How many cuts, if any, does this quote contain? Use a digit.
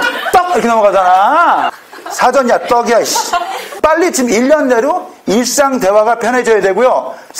2